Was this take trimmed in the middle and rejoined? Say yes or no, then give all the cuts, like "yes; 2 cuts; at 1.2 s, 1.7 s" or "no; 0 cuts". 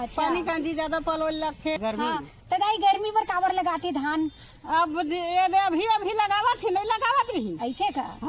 yes; 1 cut; at 1.8 s